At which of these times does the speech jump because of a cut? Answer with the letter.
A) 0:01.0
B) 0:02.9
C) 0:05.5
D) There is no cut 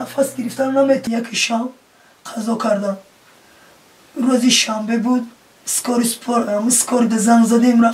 A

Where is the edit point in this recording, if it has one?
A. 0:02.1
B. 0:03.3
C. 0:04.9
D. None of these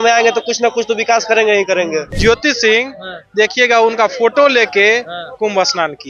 A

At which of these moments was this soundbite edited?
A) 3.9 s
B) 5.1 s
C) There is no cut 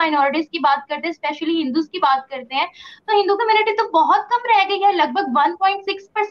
C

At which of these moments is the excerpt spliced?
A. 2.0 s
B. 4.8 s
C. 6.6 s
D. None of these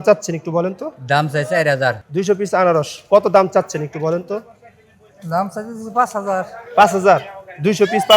A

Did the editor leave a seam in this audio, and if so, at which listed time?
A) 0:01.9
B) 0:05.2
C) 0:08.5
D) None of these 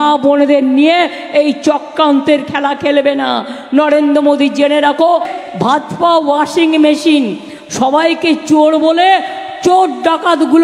B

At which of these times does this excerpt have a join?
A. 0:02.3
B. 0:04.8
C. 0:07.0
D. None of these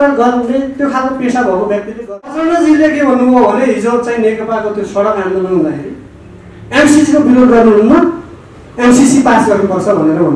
A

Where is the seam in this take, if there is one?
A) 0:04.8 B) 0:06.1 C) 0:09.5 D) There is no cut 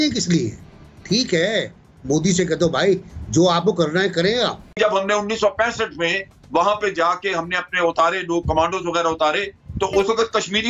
A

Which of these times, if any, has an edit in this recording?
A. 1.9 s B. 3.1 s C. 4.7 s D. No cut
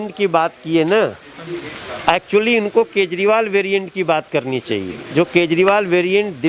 D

